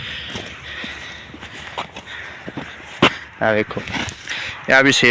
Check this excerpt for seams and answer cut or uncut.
uncut